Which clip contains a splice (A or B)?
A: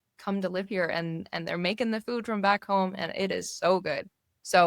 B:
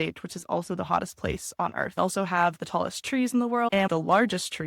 B